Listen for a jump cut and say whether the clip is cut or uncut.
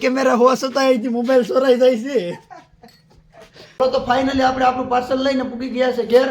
cut